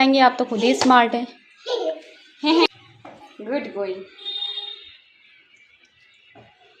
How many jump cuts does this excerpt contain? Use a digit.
1